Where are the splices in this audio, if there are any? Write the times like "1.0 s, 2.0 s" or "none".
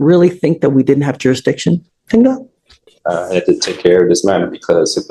none